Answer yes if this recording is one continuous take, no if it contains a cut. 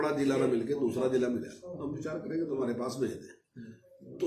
no